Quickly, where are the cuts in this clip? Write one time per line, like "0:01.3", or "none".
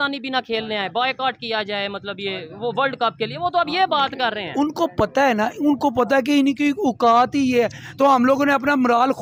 none